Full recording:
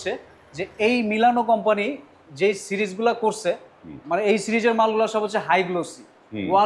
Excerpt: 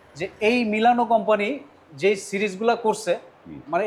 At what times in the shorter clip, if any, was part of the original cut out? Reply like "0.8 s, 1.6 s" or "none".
none